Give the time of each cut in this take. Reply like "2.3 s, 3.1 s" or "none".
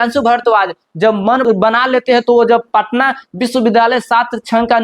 1.4 s